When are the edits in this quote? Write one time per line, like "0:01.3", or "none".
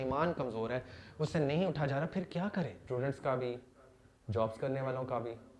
0:02.9